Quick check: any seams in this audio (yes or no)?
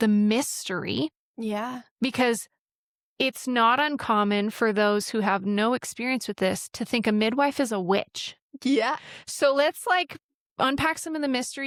no